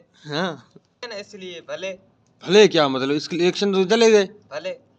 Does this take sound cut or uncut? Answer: cut